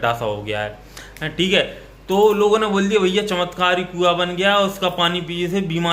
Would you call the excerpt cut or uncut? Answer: uncut